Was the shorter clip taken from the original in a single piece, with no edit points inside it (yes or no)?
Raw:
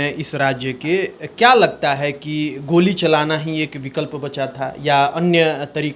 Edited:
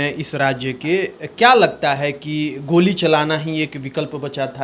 yes